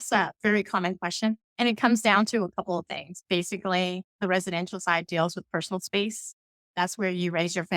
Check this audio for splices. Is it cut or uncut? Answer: cut